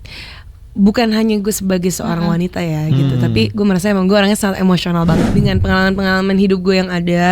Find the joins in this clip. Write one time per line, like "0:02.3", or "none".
0:05.2